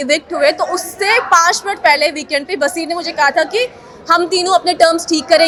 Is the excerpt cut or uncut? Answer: uncut